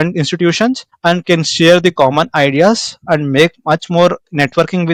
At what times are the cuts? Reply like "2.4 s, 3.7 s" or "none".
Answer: none

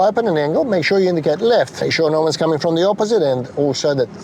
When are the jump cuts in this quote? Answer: 1.8 s

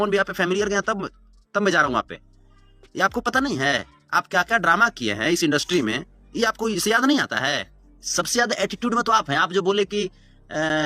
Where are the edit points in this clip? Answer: 7.7 s

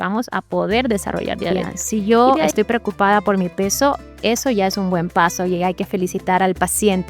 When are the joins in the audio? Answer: 1.7 s

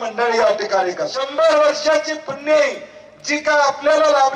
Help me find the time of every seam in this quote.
1.2 s

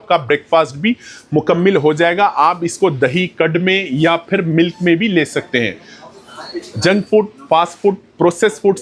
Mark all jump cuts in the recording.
none

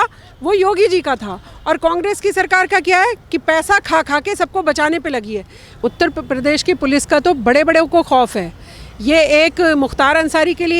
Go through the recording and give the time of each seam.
5.8 s

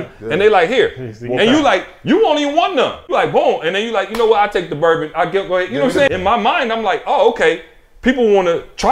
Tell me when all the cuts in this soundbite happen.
3.1 s, 6.1 s

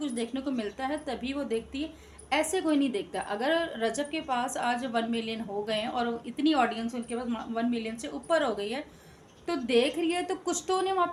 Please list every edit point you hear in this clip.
none

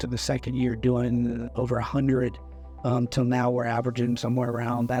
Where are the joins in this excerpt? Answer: none

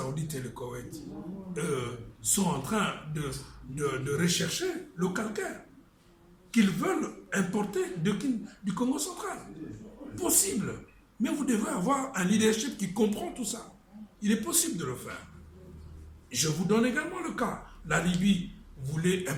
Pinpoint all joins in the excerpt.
none

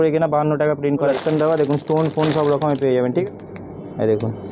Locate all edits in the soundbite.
1.1 s, 3.2 s

